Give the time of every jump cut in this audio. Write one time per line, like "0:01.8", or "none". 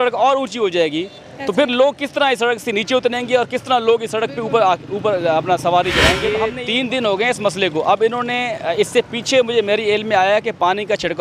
0:06.6